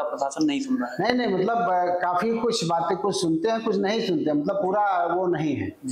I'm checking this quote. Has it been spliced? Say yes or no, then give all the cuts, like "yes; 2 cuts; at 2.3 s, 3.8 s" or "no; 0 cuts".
no; 0 cuts